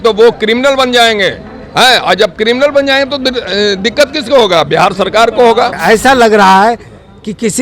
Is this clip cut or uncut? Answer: cut